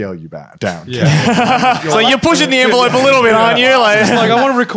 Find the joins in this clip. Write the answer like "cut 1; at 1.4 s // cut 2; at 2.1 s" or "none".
cut 1; at 1.8 s